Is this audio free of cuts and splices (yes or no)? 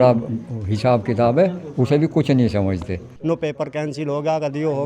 no